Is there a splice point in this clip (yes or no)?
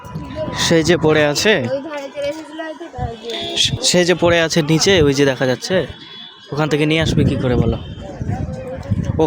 yes